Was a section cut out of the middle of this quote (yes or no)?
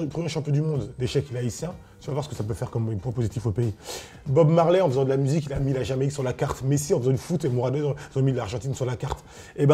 no